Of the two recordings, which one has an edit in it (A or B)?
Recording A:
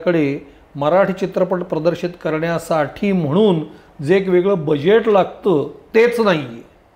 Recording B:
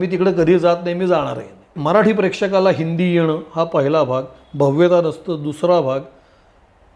B